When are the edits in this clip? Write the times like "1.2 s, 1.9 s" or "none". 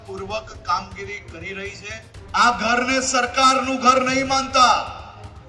2.1 s